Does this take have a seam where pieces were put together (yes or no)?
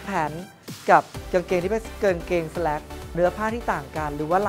yes